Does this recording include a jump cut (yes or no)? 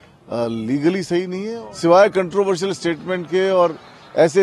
yes